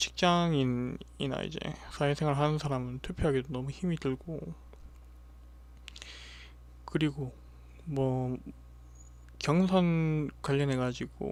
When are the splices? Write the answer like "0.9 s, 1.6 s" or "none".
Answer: none